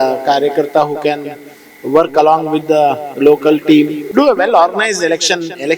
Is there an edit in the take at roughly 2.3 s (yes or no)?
no